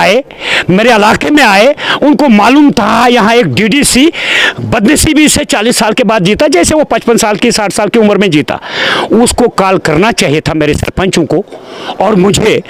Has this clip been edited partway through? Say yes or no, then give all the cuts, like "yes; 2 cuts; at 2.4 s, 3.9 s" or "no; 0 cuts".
no; 0 cuts